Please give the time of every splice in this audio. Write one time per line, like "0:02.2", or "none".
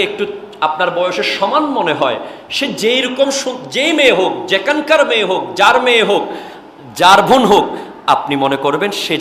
none